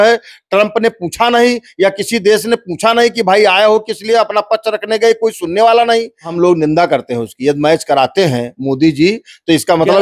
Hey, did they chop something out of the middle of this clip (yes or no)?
yes